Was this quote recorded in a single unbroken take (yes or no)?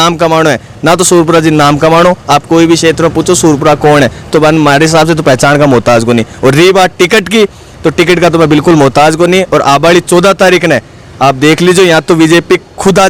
yes